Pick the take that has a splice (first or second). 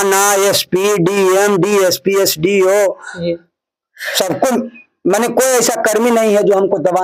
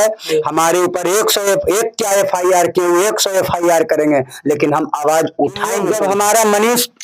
second